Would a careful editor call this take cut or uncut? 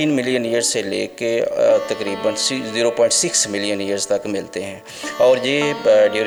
uncut